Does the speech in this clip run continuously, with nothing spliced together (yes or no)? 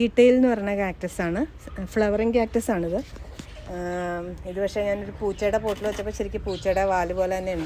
yes